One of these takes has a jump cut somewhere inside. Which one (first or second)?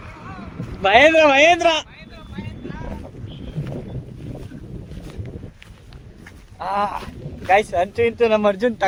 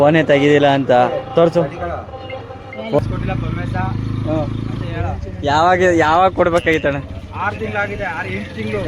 second